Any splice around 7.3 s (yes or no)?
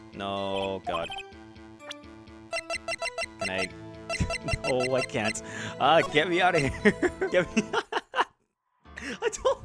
yes